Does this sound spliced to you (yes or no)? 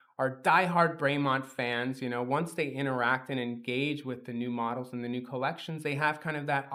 no